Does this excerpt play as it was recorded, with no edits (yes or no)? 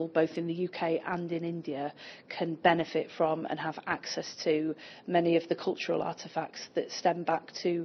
yes